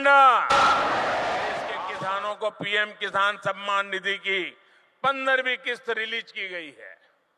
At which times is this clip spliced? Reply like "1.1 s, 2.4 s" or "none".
1.9 s

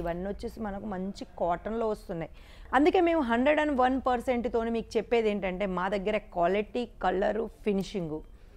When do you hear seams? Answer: 2.5 s

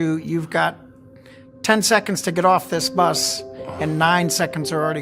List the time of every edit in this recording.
none

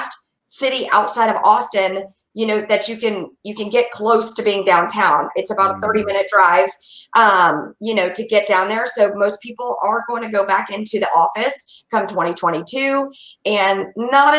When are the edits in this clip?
none

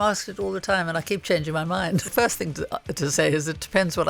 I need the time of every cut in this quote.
2.1 s

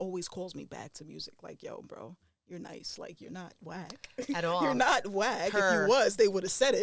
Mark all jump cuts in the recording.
none

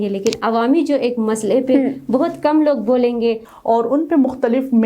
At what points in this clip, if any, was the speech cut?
3.5 s

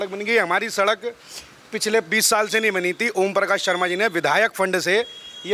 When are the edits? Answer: none

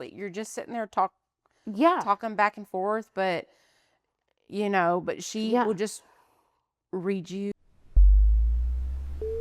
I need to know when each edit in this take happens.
7.5 s

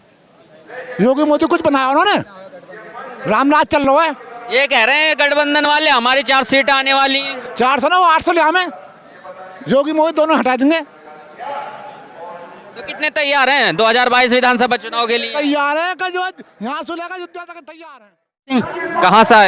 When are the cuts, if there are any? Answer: 18.5 s

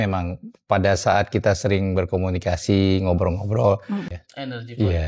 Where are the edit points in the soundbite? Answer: 4.1 s

